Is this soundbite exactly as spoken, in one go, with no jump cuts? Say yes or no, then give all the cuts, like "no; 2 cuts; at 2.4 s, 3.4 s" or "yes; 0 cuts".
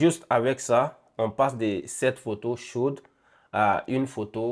yes; 0 cuts